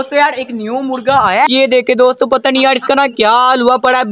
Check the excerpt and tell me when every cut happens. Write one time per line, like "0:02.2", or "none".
0:01.5

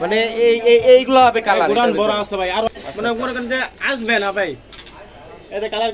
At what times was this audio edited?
0:02.7

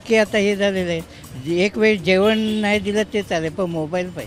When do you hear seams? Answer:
none

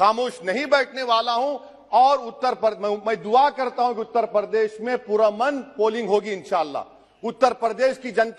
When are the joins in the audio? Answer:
none

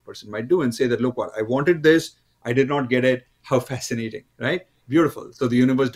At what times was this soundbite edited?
none

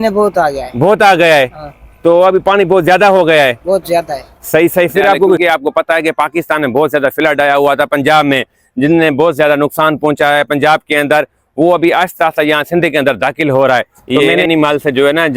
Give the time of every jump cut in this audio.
0:05.4
0:14.0

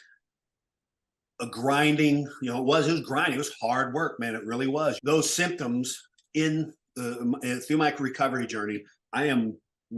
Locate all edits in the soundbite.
0:05.0

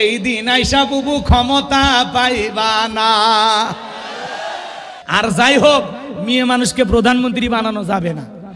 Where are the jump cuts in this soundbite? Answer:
0:04.9

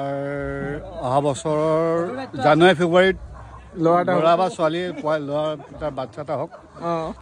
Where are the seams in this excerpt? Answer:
none

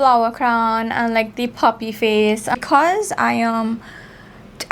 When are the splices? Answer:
0:02.5

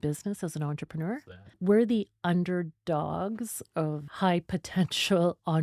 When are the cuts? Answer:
0:01.6
0:04.1

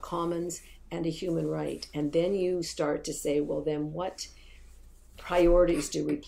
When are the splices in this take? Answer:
none

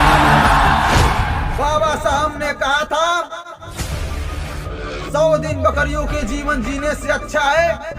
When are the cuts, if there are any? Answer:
0:01.2

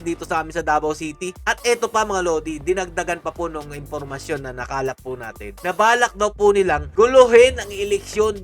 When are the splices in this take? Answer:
none

